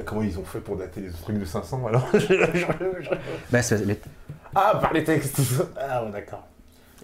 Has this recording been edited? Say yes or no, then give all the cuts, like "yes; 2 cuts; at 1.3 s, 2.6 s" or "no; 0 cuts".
no; 0 cuts